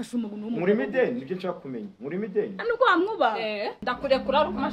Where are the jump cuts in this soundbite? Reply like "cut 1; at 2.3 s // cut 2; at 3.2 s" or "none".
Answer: cut 1; at 3.8 s